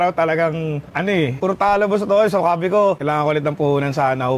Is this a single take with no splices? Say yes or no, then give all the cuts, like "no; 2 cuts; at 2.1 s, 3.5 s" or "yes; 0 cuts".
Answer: no; 2 cuts; at 1.2 s, 3.0 s